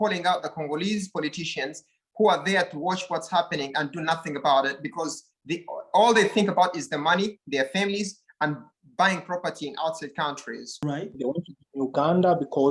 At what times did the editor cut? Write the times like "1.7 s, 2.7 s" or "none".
10.8 s